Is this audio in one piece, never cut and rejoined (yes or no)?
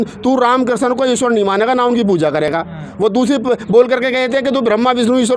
yes